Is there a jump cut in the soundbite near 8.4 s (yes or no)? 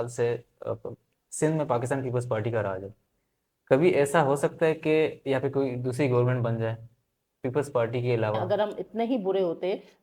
yes